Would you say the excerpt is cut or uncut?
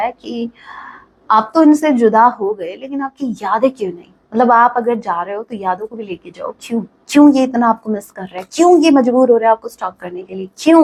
uncut